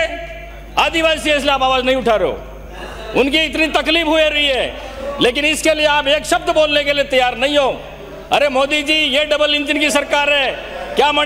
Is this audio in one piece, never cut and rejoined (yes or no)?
yes